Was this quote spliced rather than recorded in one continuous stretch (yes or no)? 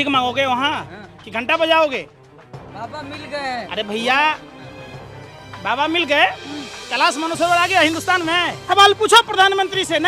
yes